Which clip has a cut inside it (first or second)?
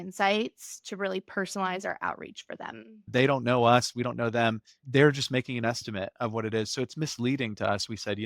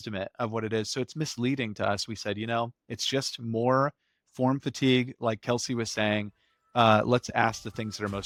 first